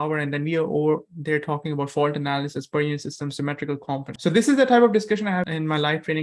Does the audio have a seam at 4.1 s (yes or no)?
yes